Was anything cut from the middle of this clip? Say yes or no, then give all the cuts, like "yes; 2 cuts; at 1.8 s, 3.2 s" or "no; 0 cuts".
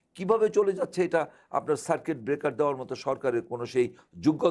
no; 0 cuts